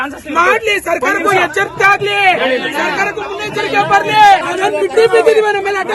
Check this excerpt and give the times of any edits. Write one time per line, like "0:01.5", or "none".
0:04.5